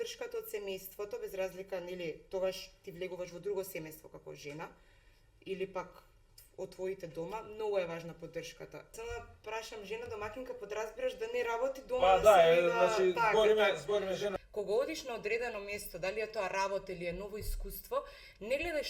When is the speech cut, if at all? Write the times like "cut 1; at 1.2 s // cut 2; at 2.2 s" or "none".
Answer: cut 1; at 8.9 s // cut 2; at 14.3 s

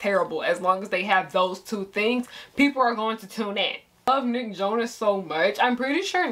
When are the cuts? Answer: cut 1; at 4.1 s

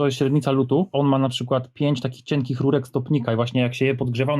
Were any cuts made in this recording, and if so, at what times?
cut 1; at 0.9 s

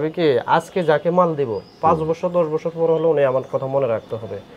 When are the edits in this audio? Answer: none

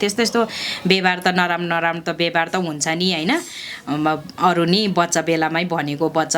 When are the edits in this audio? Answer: none

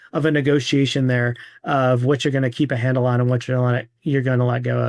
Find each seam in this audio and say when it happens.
none

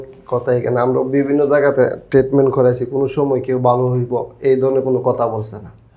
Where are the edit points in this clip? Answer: none

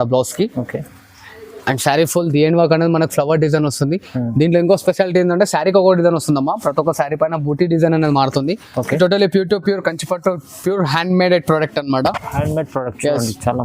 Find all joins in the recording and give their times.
cut 1; at 8.9 s

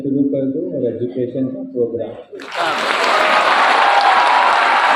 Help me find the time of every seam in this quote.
none

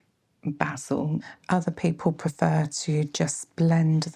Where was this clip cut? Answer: cut 1; at 1.3 s

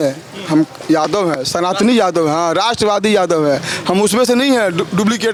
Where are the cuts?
none

